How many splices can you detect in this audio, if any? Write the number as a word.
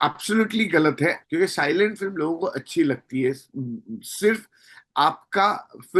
one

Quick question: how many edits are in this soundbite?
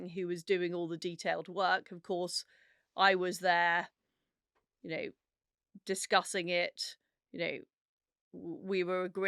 zero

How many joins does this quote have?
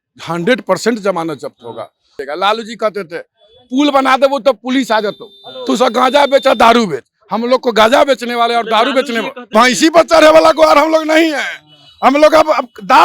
two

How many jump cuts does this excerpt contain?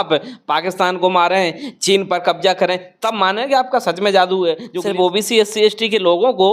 one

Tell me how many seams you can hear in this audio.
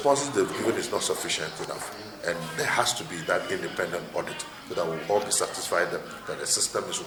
zero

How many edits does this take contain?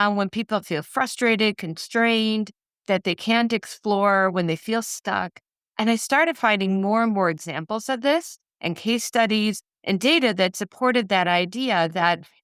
zero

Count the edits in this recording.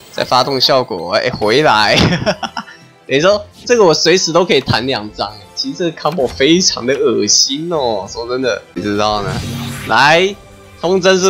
one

